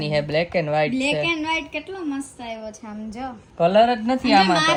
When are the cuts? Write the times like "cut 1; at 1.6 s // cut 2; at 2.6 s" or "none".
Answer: none